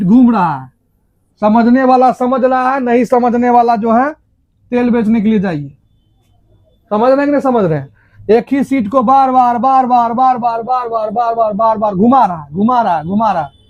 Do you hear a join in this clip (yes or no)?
no